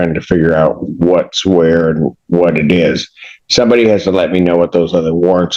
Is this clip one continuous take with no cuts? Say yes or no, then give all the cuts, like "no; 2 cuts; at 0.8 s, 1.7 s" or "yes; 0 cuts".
yes; 0 cuts